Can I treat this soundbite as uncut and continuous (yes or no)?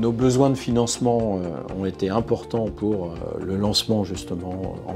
yes